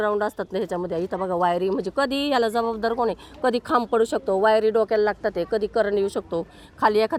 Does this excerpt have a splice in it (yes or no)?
no